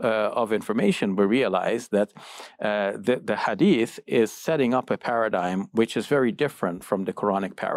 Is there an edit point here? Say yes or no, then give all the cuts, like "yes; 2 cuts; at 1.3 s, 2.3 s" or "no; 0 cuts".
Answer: no; 0 cuts